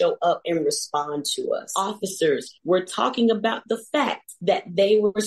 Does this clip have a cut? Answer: yes; 2 cuts; at 1.7 s, 4.3 s

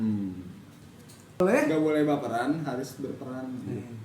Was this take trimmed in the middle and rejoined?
yes; 1 cut; at 1.4 s

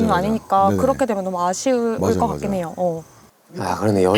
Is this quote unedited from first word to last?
yes; 0 cuts

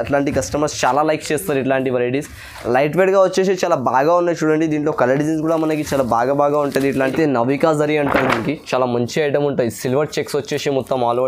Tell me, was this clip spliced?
yes; 1 cut; at 7.1 s

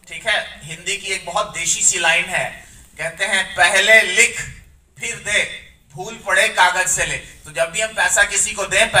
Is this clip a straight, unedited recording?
yes; 0 cuts

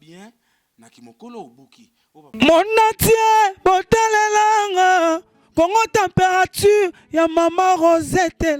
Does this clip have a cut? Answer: yes; 1 cut; at 2.3 s

